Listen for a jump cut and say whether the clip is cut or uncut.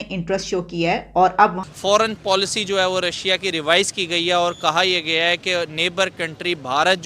cut